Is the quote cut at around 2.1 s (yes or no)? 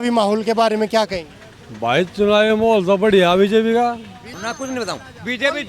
no